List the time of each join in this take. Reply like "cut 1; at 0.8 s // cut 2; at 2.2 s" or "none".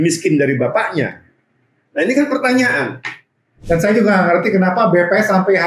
cut 1; at 3.5 s

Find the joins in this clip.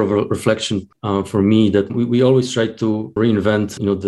cut 1; at 0.9 s // cut 2; at 3.2 s

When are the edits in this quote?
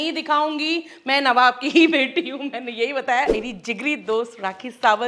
cut 1; at 3.3 s

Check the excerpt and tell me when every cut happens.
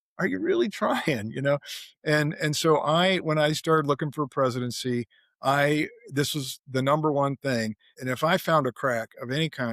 cut 1; at 7.9 s

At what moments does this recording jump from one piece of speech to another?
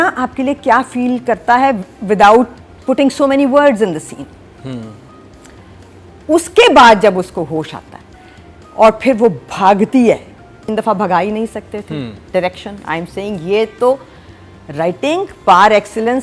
cut 1; at 10.7 s

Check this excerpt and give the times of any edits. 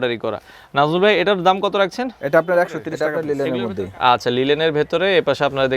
cut 1; at 3.3 s

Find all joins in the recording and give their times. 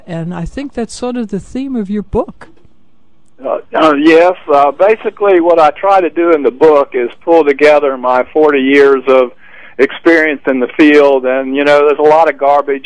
cut 1; at 7.6 s

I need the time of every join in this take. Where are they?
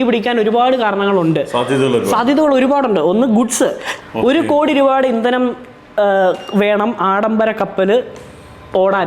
cut 1; at 3.9 s

